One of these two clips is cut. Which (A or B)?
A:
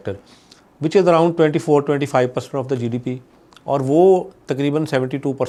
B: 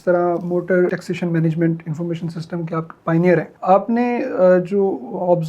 B